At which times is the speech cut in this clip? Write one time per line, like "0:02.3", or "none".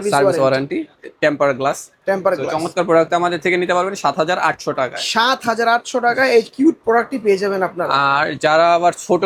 none